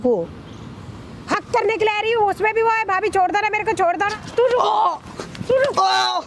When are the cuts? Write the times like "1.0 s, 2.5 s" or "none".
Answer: 4.1 s